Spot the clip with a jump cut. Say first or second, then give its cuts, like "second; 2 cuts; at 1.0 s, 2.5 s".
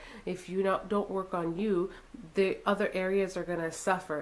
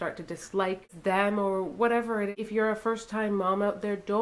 second; 2 cuts; at 0.9 s, 2.3 s